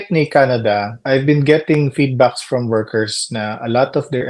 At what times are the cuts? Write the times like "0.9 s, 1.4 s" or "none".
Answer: 0.9 s